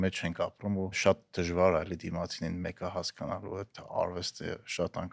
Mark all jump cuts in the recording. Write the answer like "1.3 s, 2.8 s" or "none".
0.9 s